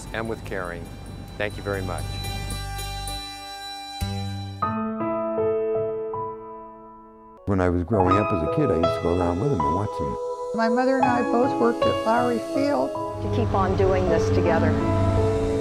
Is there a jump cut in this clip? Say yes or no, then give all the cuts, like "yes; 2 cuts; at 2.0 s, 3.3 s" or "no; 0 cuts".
no; 0 cuts